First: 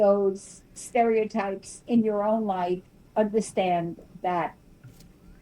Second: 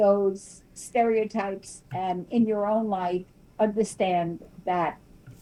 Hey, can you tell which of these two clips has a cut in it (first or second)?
first